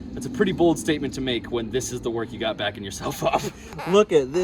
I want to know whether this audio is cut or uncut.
cut